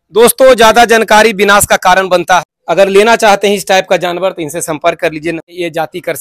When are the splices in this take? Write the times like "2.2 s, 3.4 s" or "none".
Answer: 2.4 s, 5.5 s